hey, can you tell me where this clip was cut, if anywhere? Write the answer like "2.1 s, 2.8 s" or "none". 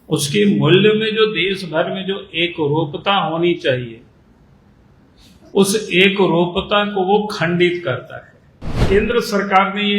8.8 s